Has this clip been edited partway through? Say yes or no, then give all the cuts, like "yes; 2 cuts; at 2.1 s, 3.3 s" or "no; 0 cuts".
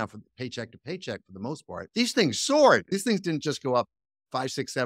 yes; 2 cuts; at 1.9 s, 2.9 s